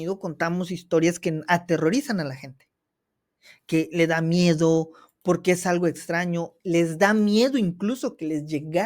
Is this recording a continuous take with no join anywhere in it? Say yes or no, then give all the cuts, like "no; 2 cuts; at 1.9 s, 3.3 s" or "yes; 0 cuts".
yes; 0 cuts